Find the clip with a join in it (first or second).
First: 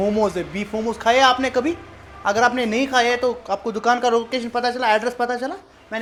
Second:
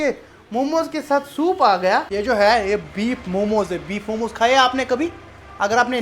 second